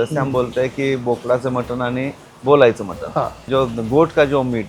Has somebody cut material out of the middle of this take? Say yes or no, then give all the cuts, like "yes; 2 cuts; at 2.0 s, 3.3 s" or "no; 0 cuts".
no; 0 cuts